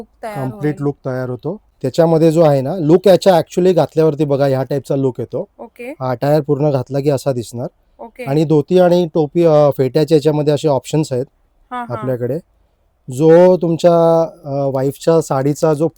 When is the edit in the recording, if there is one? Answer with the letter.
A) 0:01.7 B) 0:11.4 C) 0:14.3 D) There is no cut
A